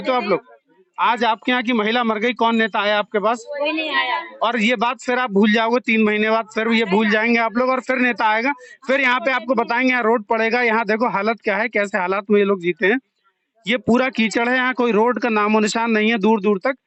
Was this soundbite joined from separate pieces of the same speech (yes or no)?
no